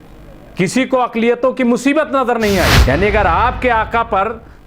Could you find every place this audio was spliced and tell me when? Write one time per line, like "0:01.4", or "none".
0:02.8